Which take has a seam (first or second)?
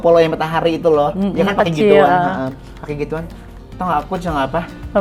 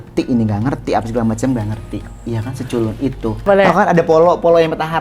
second